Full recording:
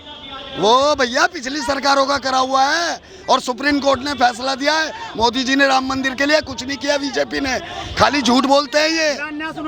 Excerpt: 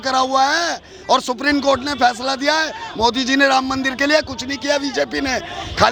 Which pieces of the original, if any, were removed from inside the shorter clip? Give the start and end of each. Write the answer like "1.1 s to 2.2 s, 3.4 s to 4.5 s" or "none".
none